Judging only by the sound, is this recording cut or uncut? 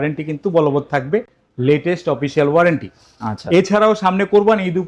uncut